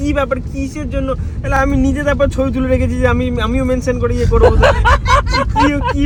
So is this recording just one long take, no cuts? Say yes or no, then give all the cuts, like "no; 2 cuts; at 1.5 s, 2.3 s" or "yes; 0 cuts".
yes; 0 cuts